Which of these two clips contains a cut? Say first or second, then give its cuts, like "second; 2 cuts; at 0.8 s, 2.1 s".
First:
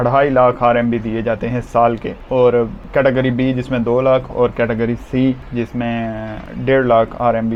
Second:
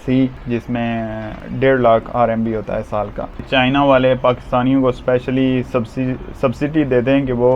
second; 1 cut; at 3.4 s